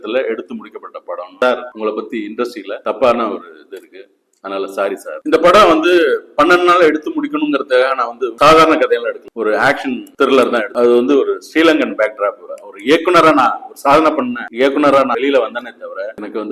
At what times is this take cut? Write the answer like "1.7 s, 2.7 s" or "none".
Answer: 1.3 s, 5.1 s, 10.7 s, 12.4 s, 15.1 s